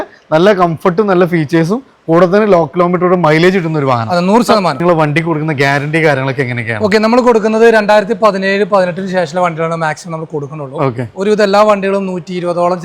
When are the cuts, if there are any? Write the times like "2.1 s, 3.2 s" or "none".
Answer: 4.8 s